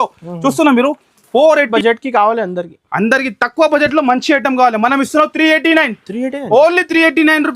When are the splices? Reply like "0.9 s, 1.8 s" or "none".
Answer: 1.7 s